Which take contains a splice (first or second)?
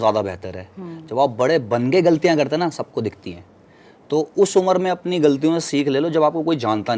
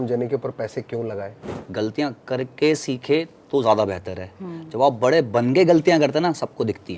second